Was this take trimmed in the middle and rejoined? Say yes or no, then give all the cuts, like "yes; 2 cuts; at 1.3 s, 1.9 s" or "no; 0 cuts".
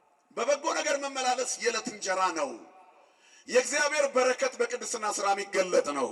no; 0 cuts